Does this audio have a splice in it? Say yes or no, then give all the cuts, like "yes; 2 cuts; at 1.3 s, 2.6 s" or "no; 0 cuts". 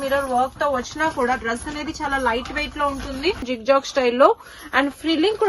yes; 1 cut; at 3.5 s